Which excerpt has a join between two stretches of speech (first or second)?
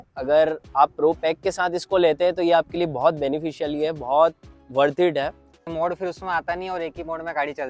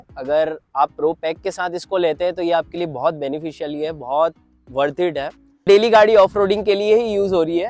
second